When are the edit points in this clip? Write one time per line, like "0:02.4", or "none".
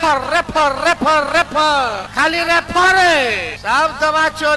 0:02.0
0:03.5